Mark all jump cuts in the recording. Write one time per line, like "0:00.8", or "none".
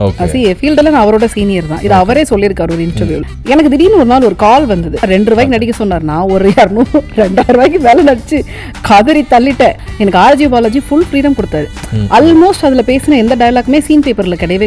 0:03.3
0:05.1
0:09.9